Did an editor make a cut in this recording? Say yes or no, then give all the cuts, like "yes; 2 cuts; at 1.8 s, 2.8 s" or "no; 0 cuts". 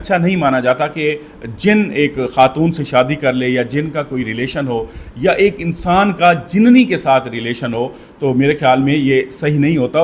no; 0 cuts